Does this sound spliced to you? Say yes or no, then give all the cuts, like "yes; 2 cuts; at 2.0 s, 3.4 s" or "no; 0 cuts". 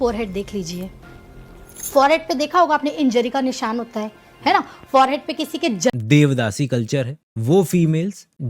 yes; 2 cuts; at 4.6 s, 5.9 s